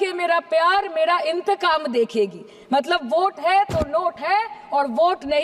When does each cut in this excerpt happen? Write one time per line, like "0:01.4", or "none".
none